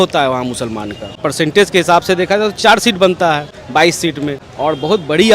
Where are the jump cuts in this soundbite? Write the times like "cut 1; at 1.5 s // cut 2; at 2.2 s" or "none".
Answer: cut 1; at 1.2 s // cut 2; at 3.5 s // cut 3; at 4.5 s